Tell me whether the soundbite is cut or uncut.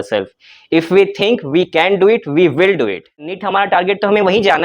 cut